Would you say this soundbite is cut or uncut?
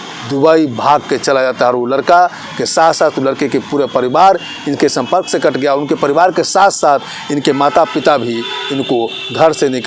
uncut